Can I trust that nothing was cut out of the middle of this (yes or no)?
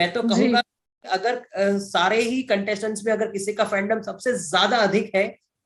yes